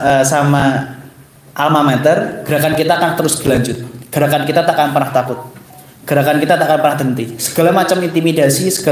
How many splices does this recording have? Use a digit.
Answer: 1